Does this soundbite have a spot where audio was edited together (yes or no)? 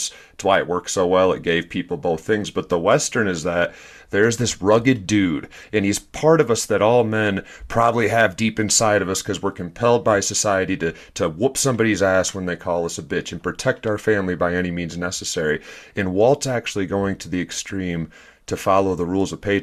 no